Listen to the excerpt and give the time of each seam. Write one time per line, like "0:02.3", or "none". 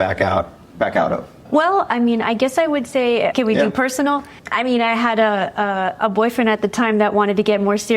0:01.3
0:03.3
0:04.4